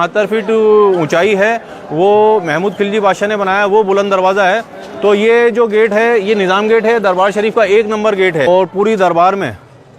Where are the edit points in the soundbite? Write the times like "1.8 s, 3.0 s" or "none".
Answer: 8.5 s